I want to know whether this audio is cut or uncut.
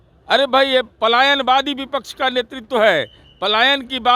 uncut